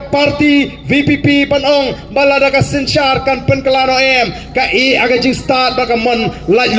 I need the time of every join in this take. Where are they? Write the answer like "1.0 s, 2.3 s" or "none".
none